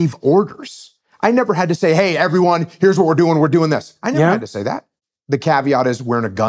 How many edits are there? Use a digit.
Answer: 1